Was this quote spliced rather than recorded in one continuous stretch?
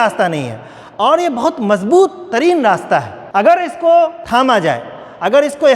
yes; 2 cuts; at 3.2 s, 4.2 s

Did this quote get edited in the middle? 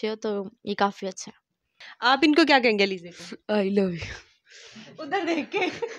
yes; 1 cut; at 1.9 s

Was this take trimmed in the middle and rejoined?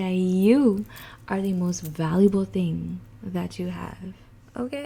no; 0 cuts

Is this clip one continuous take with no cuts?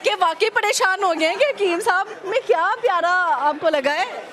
yes; 0 cuts

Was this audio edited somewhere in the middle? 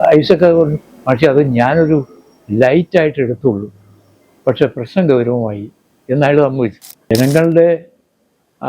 yes; 1 cut; at 7.1 s

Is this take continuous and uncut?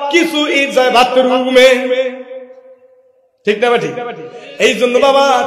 yes; 0 cuts

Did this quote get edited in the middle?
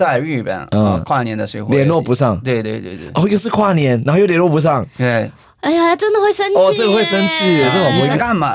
no; 0 cuts

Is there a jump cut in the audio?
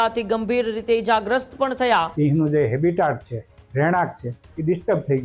yes; 1 cut; at 2.1 s

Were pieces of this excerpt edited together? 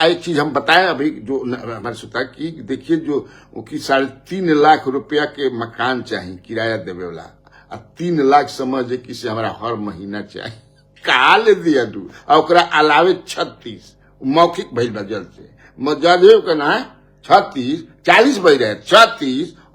no; 0 cuts

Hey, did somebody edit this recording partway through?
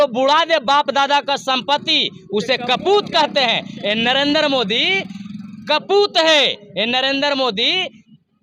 no; 0 cuts

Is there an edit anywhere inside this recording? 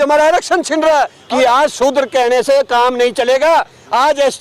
yes; 1 cut; at 1.2 s

